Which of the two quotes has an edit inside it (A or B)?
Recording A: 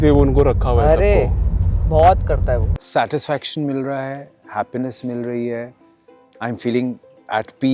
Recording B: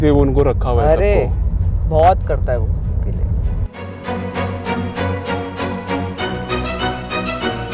A